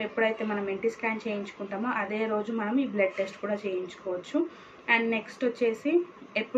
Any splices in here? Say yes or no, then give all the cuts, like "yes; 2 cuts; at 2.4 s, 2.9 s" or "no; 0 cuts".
no; 0 cuts